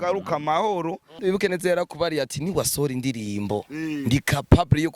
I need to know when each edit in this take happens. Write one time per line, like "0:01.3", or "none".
0:01.1